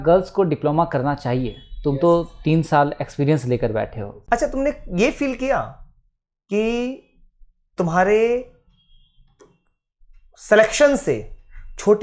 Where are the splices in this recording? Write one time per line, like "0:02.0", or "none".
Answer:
0:04.1